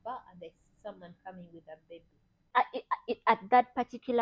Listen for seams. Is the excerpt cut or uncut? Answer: cut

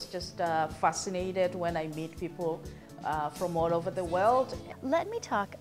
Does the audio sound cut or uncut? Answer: cut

